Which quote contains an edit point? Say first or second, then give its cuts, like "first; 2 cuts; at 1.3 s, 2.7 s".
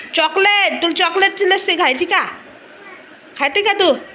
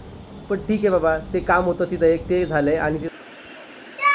second; 1 cut; at 3.0 s